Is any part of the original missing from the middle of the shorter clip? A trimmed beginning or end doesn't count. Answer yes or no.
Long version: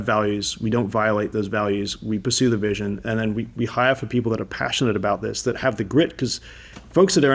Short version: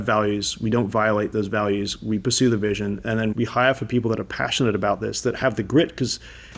yes